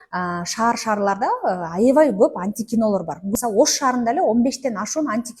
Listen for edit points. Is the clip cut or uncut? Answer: cut